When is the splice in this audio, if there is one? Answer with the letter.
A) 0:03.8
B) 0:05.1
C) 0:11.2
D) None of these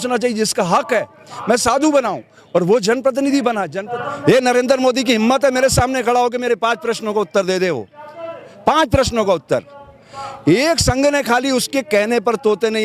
A